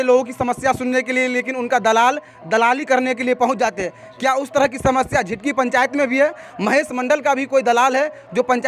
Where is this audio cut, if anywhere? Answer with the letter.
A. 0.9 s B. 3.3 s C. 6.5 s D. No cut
D